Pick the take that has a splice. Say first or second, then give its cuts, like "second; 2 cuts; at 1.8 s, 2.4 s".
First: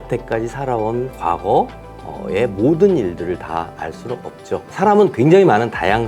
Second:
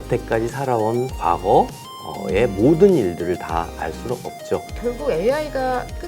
second; 1 cut; at 4.7 s